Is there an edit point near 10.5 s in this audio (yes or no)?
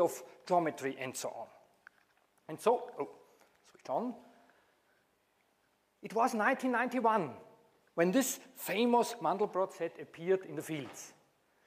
yes